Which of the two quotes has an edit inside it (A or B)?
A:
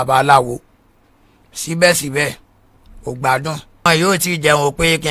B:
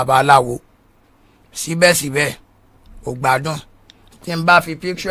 A